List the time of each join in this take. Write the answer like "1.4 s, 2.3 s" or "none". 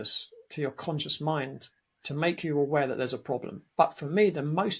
3.6 s